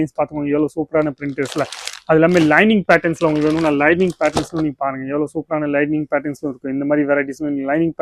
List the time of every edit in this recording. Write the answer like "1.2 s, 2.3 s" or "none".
none

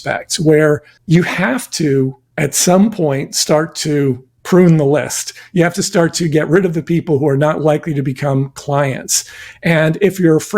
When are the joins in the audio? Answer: 0.9 s, 2.2 s, 4.3 s

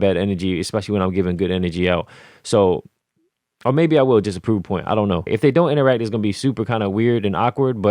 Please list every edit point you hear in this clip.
5.3 s

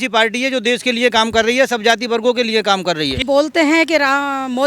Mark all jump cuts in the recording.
3.2 s

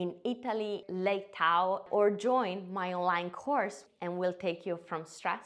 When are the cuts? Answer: 0.8 s, 1.8 s, 3.8 s

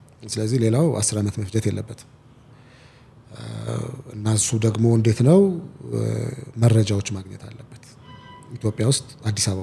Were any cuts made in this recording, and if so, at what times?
none

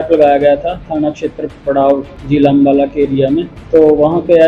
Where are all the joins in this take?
2.1 s, 3.5 s

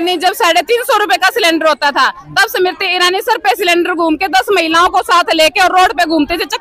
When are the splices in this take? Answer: none

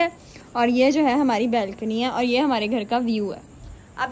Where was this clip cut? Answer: none

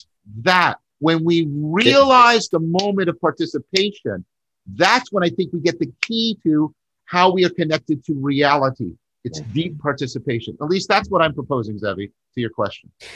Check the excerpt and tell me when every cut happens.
none

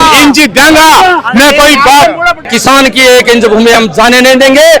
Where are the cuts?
2.5 s

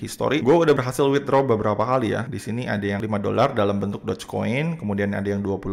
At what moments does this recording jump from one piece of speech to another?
none

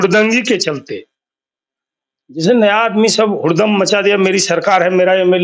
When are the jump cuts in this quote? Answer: none

